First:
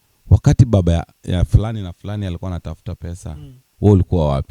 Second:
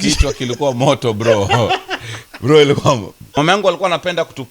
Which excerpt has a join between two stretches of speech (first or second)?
second